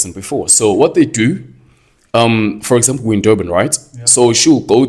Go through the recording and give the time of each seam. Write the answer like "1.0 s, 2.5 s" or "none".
none

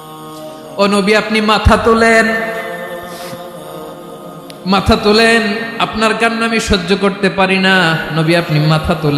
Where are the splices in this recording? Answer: 0.8 s, 2.7 s, 4.6 s

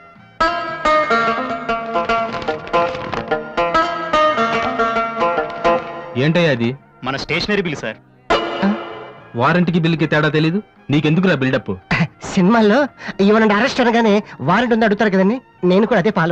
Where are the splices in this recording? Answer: none

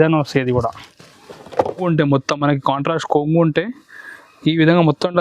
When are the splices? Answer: 1.9 s

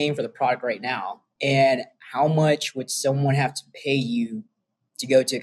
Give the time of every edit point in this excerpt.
1.2 s

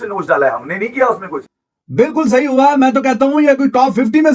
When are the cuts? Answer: 1.3 s

